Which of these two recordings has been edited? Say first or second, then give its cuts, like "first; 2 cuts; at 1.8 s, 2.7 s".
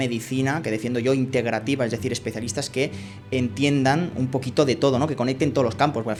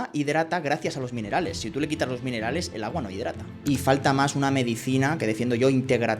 second; 1 cut; at 3.5 s